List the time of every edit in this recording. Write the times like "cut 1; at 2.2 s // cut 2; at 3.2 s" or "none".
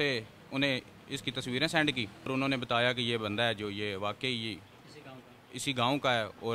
cut 1; at 2.3 s